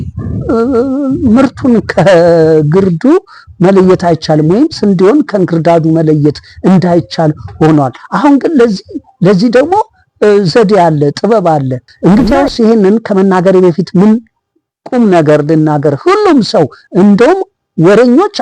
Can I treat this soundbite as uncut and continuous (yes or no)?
no